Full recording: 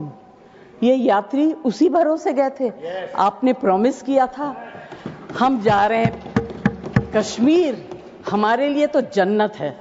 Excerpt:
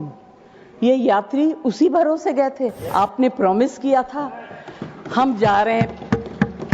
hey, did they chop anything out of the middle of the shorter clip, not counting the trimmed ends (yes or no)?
yes